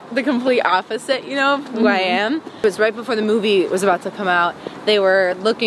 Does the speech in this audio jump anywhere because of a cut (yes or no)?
yes